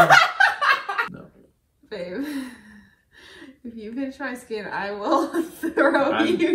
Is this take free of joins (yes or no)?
no